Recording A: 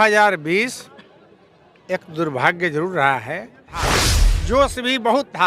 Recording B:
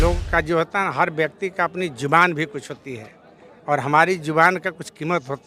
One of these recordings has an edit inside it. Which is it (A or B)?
A